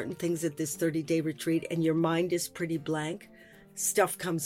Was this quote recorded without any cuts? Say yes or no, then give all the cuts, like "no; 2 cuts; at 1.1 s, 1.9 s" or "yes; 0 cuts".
no; 1 cut; at 3.5 s